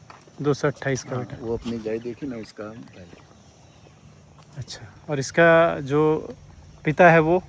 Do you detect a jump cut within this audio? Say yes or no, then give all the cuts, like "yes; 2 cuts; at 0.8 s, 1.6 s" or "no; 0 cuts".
no; 0 cuts